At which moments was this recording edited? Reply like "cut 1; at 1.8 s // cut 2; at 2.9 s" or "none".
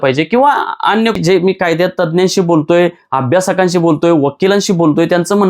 cut 1; at 1.2 s